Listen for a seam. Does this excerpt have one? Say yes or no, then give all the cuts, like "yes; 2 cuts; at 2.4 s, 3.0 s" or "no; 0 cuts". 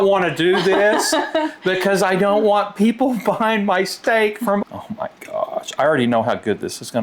yes; 1 cut; at 4.6 s